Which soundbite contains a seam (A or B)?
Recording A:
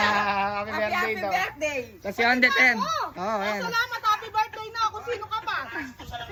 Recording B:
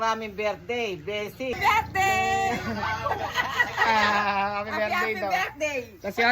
B